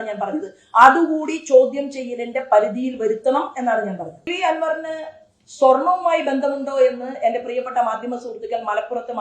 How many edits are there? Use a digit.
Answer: 1